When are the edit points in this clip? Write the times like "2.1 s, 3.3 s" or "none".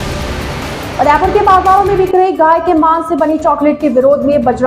0.9 s

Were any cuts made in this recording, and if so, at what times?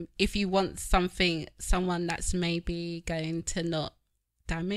none

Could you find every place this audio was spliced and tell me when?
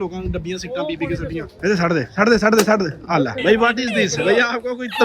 1.5 s, 3.4 s

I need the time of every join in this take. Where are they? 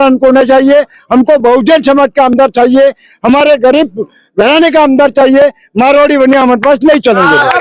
none

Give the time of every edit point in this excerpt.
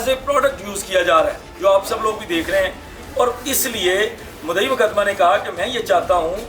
none

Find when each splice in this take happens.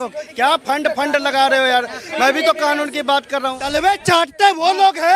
3.4 s

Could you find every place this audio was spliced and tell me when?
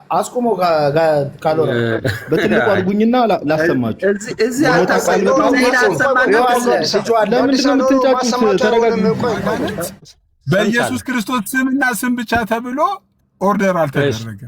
9.5 s

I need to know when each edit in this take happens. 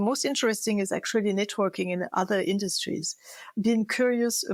none

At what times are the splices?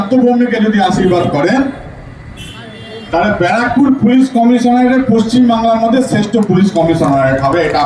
none

